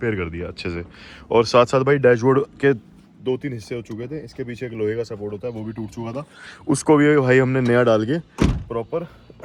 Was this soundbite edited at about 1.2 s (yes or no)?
no